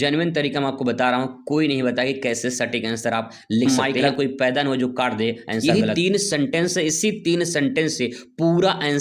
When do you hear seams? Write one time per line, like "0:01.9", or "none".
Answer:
0:03.7
0:05.6